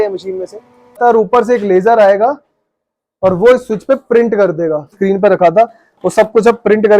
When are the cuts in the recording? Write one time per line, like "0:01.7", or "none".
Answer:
0:01.0
0:04.9